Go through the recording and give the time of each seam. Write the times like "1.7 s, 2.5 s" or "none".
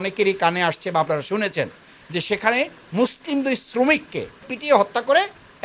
4.4 s